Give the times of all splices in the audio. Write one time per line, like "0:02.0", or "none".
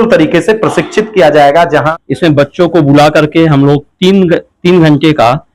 0:01.9